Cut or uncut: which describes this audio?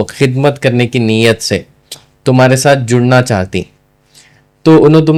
uncut